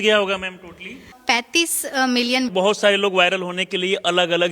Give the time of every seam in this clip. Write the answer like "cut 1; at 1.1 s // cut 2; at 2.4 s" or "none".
cut 1; at 1.2 s // cut 2; at 2.5 s

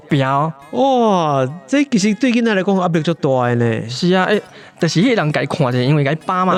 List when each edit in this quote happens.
none

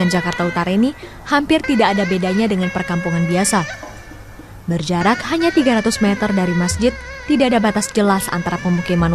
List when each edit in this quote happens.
cut 1; at 7.4 s

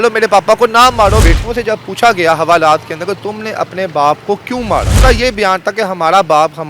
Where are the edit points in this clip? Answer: cut 1; at 1.2 s // cut 2; at 4.9 s

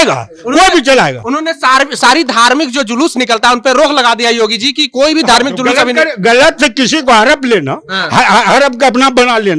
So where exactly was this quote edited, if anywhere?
none

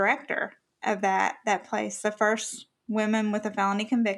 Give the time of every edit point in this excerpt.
none

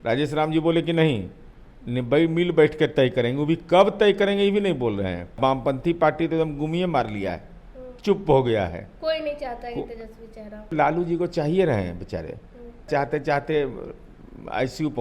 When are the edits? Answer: cut 1; at 5.4 s // cut 2; at 10.7 s // cut 3; at 12.9 s

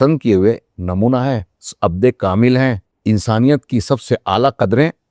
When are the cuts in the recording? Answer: cut 1; at 2.9 s

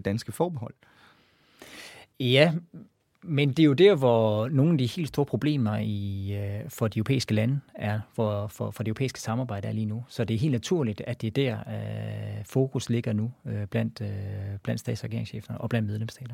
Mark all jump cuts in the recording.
cut 1; at 2.1 s

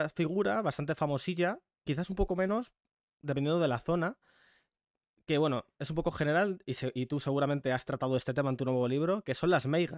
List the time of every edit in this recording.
none

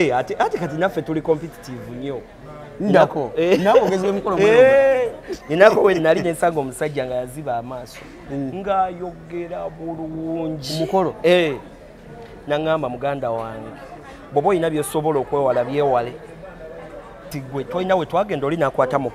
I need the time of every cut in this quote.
cut 1; at 17.4 s

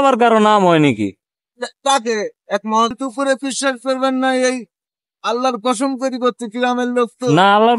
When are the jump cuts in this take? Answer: cut 1; at 2.9 s

